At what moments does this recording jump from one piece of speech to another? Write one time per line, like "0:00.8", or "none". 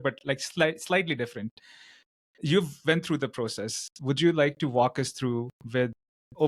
none